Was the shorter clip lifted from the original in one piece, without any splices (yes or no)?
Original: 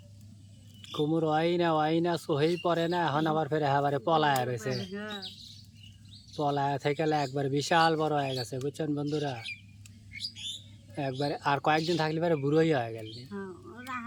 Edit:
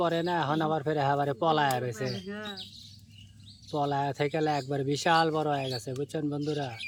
yes